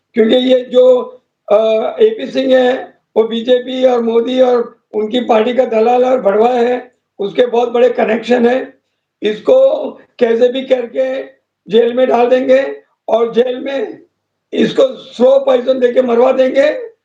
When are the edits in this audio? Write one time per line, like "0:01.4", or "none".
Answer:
none

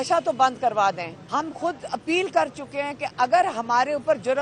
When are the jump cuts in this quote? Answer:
0:01.1

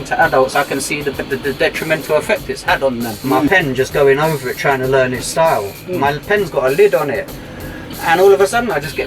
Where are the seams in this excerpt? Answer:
0:03.4

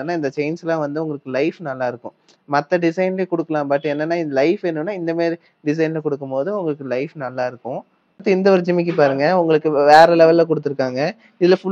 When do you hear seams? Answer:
0:08.1

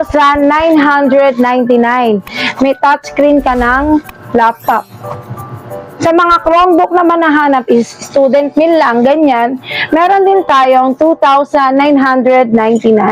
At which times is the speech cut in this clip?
none

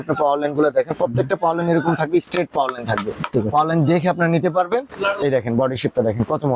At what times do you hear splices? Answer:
0:04.9

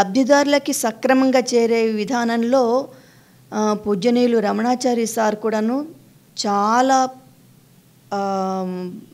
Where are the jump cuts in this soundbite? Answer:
none

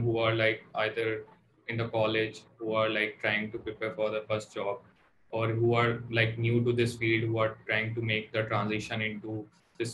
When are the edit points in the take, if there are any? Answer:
none

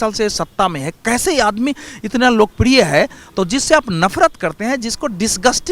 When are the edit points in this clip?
none

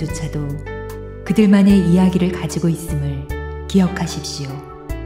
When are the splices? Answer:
0:04.1

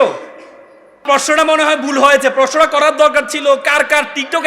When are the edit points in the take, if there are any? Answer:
0:01.0

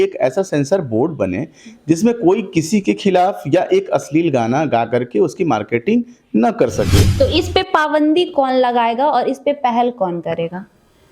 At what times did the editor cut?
0:07.0

